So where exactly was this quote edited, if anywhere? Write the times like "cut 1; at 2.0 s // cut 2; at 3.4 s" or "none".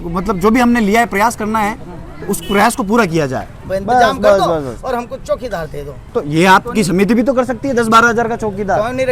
cut 1; at 3.5 s // cut 2; at 6.0 s